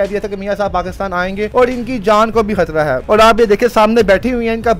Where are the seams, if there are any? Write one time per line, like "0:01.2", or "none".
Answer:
0:01.5
0:03.0